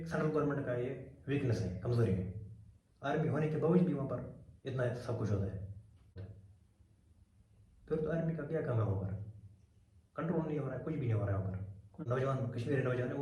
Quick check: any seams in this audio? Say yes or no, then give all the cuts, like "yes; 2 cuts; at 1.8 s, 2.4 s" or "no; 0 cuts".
yes; 2 cuts; at 6.3 s, 12.1 s